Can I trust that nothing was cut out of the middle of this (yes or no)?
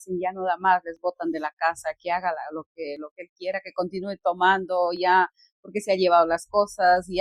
yes